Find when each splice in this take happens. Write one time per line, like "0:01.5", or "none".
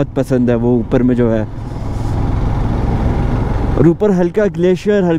none